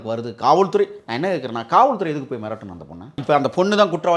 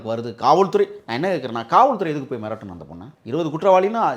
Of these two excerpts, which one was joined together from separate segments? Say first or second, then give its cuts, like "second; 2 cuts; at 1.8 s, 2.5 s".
first; 1 cut; at 3.2 s